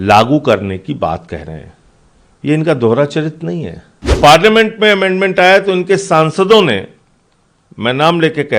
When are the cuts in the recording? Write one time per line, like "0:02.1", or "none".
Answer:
0:04.1